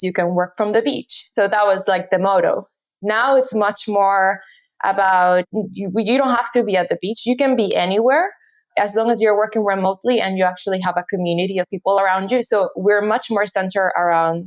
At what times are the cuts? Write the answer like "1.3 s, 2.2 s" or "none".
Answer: none

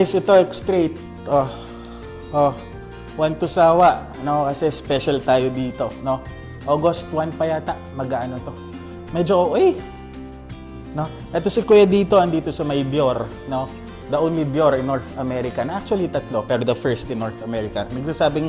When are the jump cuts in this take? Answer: none

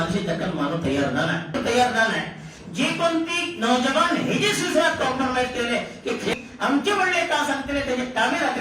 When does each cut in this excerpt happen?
1.6 s, 6.3 s

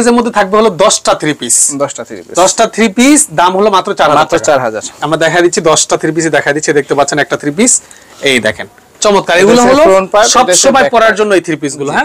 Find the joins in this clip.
none

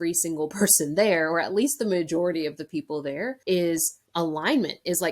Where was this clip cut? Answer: 3.4 s, 4.0 s

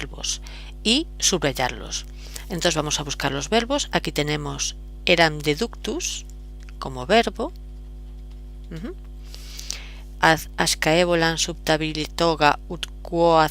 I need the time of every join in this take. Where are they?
4.1 s

